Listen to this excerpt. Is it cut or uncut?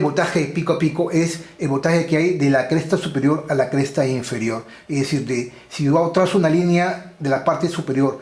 uncut